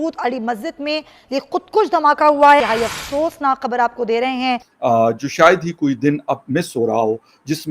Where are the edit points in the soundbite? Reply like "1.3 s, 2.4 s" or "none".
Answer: 2.6 s, 4.6 s